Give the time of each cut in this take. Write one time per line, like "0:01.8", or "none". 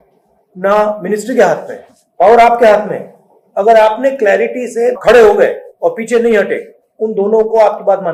none